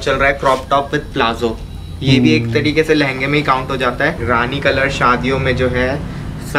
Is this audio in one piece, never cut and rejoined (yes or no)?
no